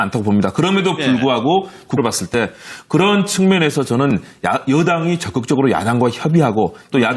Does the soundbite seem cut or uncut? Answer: uncut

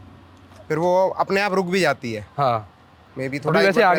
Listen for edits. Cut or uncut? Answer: uncut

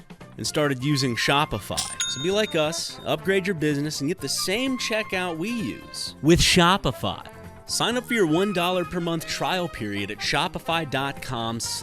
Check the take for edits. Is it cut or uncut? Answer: cut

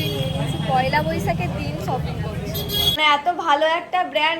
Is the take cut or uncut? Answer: cut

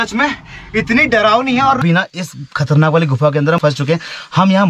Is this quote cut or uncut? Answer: cut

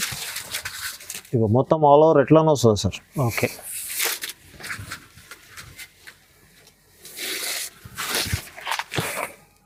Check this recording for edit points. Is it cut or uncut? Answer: uncut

